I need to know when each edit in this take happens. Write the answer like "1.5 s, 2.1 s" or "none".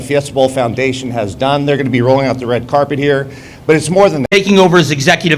4.3 s